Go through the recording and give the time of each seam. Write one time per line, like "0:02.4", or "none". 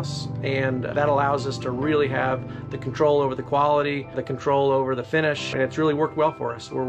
0:00.9
0:04.3
0:05.5